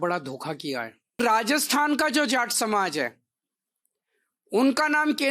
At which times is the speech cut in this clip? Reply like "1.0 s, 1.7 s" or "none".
1.2 s